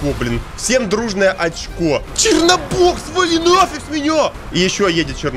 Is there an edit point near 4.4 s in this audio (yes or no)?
yes